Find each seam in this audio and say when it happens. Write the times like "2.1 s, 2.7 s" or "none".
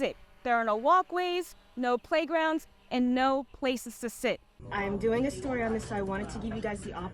4.6 s